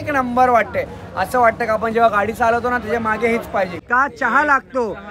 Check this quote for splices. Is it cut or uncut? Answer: cut